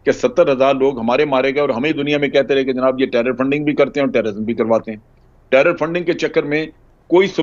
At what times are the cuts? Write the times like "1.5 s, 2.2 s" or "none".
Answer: none

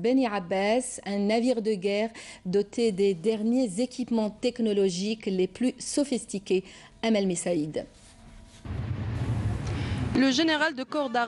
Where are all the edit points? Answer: 8.4 s

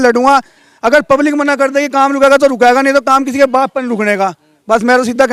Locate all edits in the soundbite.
none

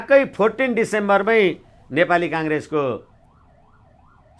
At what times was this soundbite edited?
none

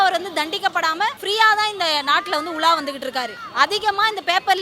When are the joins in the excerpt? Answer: 1.2 s, 3.4 s

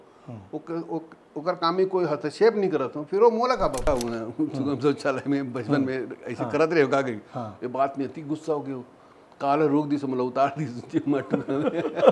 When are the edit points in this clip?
3.9 s

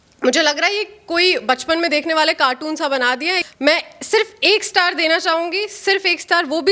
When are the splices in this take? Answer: 3.5 s

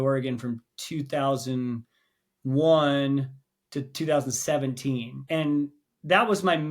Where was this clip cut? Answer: 5.1 s

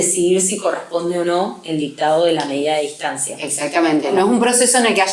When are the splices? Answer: 4.1 s

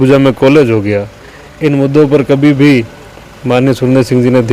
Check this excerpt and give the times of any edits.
none

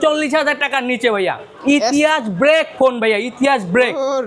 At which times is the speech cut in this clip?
none

